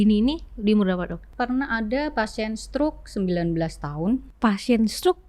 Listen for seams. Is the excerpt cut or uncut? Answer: cut